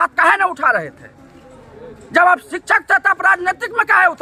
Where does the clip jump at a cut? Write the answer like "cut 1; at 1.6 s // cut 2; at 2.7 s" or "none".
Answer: none